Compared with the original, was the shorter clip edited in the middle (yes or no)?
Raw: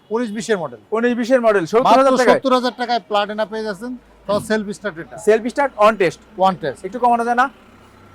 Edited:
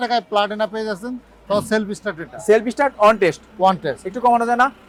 no